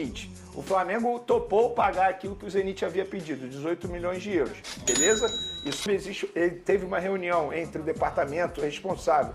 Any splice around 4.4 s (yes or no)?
no